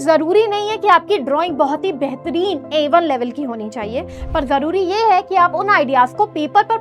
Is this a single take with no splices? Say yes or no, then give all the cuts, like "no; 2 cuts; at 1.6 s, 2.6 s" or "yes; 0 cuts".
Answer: yes; 0 cuts